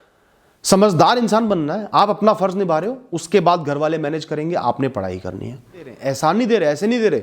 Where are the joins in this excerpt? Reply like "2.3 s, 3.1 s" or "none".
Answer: 5.9 s